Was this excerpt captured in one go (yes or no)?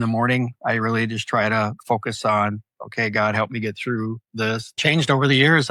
no